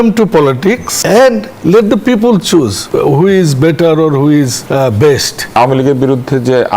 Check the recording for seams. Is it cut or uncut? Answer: cut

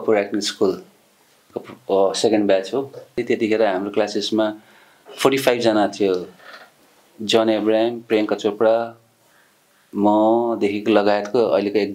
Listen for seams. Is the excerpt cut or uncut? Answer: cut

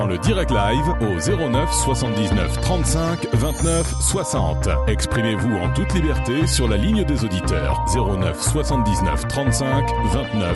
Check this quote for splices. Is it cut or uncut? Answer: uncut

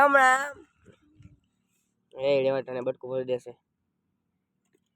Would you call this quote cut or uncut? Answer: uncut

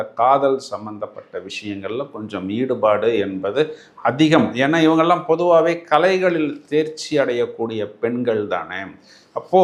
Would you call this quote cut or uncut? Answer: uncut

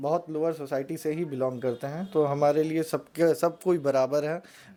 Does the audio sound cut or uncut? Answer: uncut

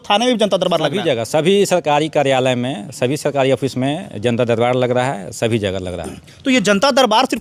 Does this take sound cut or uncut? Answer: uncut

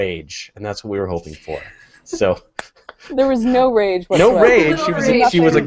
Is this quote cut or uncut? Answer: cut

